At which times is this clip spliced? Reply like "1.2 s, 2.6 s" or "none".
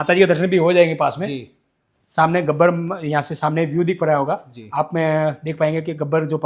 none